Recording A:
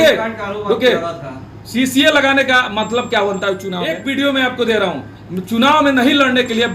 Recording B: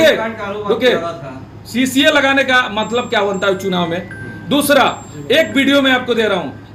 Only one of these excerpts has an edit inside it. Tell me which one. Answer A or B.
A